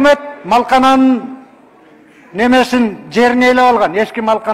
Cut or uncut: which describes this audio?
uncut